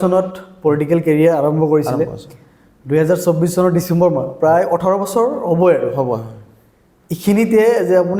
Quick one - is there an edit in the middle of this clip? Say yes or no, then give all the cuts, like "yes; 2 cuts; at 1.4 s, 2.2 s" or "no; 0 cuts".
no; 0 cuts